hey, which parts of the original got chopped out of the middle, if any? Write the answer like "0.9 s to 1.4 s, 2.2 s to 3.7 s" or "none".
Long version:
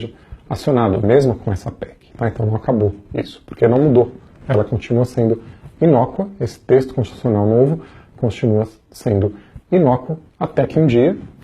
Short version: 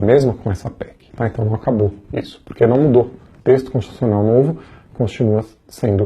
4.3 s to 6.5 s